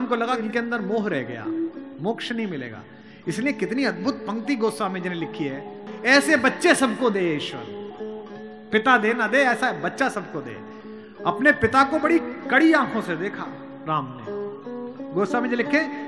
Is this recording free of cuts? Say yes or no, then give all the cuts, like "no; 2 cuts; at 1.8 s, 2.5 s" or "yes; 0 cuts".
no; 1 cut; at 5.8 s